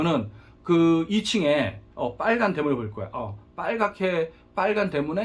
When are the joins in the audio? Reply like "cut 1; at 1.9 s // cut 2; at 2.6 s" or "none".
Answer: none